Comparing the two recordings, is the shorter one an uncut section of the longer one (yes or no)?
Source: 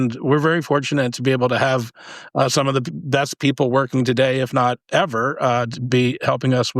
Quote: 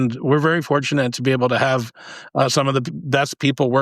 yes